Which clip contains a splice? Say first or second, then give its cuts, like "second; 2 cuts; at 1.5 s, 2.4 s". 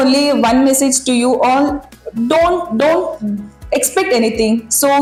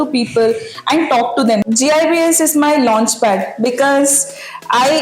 second; 1 cut; at 1.6 s